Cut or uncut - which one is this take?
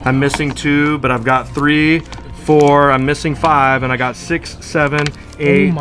uncut